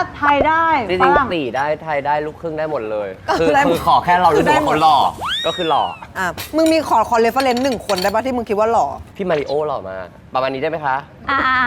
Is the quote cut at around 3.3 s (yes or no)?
no